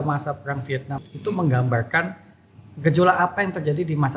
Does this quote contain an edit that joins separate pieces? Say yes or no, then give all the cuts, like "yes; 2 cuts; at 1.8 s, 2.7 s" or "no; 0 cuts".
yes; 1 cut; at 1.0 s